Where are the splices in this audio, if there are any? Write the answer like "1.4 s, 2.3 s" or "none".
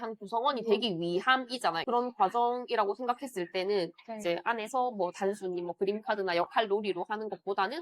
1.8 s